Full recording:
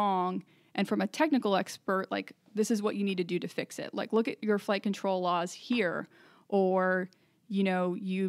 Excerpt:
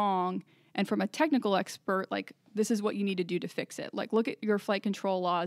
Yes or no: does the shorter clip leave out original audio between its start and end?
no